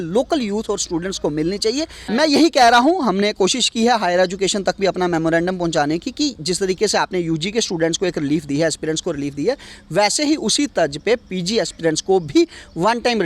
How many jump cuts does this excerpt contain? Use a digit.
1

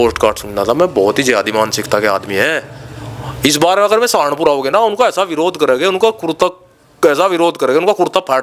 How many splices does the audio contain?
0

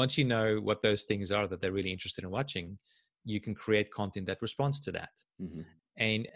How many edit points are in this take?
0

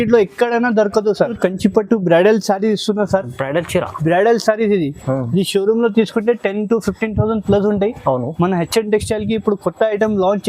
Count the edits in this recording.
1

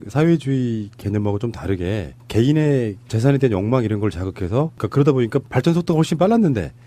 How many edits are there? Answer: 1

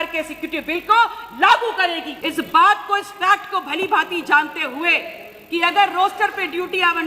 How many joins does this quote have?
1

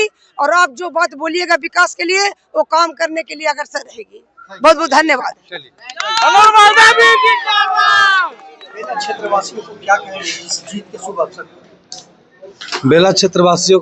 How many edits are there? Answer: 1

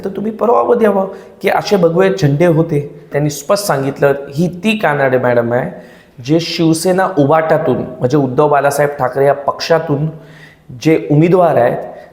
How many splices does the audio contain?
1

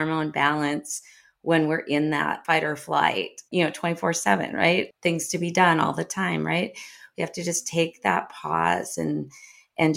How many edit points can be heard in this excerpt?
3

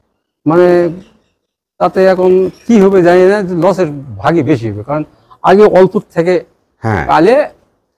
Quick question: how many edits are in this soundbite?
0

